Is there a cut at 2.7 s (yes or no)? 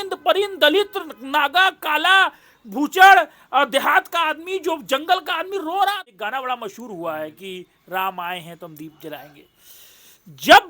no